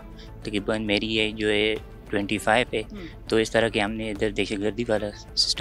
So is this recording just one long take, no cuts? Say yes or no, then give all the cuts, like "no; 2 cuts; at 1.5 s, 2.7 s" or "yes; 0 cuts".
yes; 0 cuts